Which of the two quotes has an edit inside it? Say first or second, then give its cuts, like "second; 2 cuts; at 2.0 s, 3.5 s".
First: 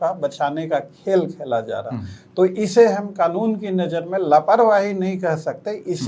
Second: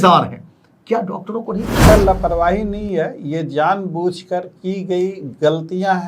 second; 1 cut; at 1.9 s